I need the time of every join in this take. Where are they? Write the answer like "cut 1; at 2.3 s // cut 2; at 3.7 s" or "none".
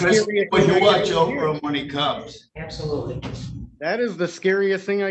none

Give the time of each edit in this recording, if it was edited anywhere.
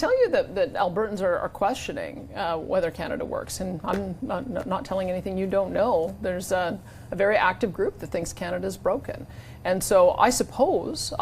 none

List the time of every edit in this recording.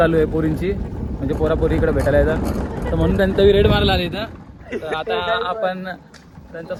none

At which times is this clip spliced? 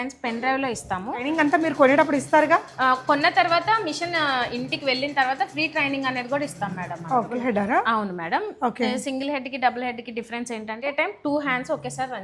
cut 1; at 1.3 s // cut 2; at 7.4 s // cut 3; at 10.9 s

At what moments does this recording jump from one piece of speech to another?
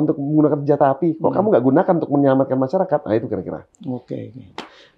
none

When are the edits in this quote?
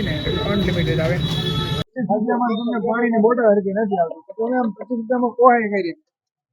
cut 1; at 1.8 s

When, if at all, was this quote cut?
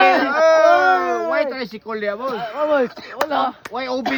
none

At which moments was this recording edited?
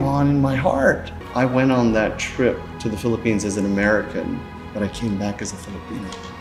cut 1; at 1.1 s // cut 2; at 2.7 s

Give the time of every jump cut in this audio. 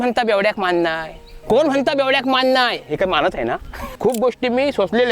cut 1; at 3.8 s

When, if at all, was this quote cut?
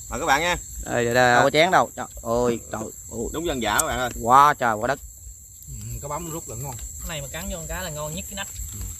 cut 1; at 1.4 s

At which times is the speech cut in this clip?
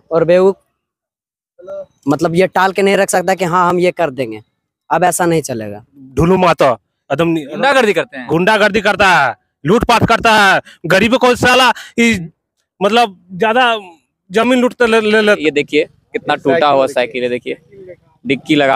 cut 1; at 6.0 s // cut 2; at 15.4 s

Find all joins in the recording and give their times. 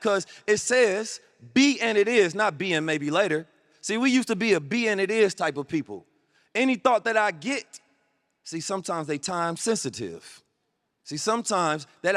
none

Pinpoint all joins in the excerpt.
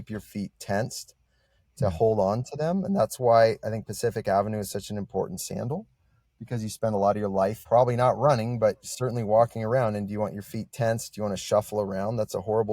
cut 1; at 7.6 s

